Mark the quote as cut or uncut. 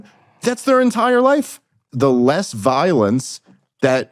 cut